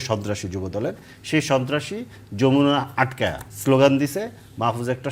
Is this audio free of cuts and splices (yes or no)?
no